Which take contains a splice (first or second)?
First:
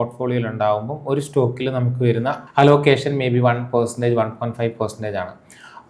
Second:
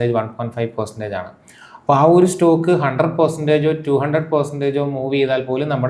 first